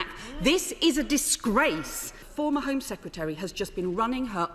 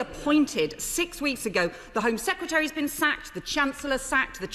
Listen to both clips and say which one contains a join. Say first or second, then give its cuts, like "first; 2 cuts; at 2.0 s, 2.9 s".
first; 1 cut; at 2.2 s